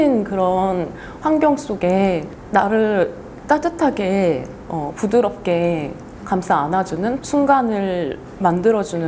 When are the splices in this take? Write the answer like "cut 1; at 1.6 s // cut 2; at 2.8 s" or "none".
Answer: cut 1; at 7.2 s